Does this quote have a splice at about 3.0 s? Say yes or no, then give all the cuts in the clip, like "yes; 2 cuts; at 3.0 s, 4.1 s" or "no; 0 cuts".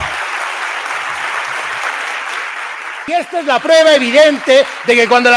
yes; 1 cut; at 3.0 s